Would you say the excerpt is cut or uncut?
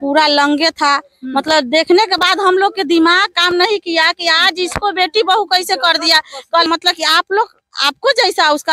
cut